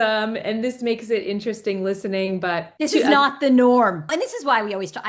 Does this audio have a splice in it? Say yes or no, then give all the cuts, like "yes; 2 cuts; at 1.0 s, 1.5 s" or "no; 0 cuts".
yes; 2 cuts; at 2.7 s, 4.1 s